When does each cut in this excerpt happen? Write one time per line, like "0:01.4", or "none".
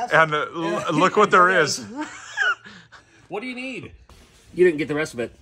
0:04.0